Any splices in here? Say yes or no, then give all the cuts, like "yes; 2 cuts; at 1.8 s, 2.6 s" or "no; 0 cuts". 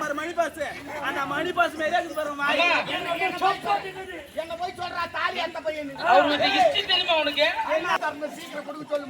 yes; 1 cut; at 8.0 s